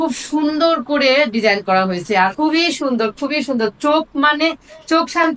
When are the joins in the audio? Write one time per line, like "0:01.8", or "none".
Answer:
0:02.3